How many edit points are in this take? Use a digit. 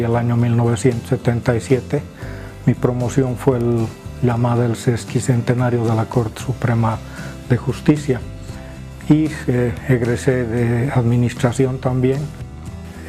0